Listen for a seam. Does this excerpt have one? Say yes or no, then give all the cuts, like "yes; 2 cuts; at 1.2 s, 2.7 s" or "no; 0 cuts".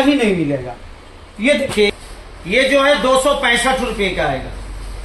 yes; 1 cut; at 1.9 s